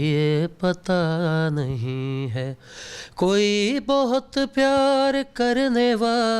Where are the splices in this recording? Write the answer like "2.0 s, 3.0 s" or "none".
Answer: none

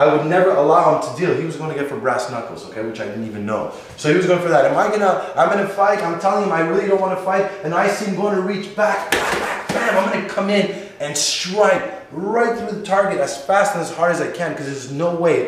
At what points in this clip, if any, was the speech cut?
13.0 s

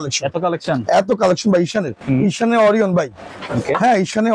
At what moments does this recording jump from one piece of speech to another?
none

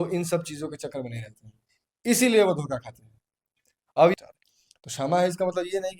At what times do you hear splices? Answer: 4.2 s

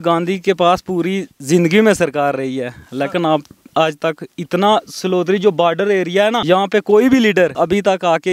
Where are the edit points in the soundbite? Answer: 6.4 s, 7.5 s

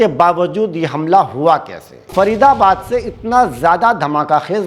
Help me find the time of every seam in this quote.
2.0 s

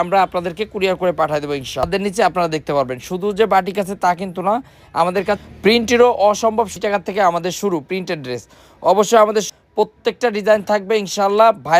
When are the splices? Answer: 1.8 s, 6.7 s, 9.5 s

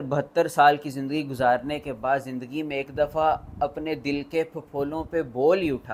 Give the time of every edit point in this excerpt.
none

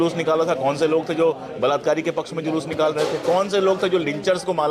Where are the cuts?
none

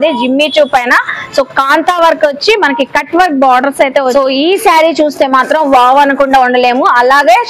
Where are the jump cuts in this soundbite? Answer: 4.2 s

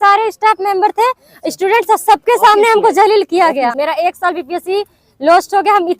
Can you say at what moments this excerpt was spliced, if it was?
3.7 s

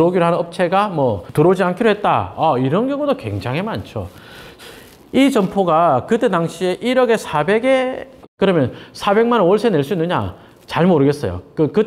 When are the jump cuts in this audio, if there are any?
4.5 s, 8.2 s

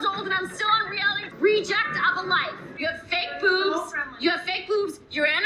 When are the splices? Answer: 1.3 s, 2.8 s

